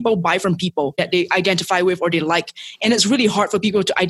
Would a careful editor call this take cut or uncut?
cut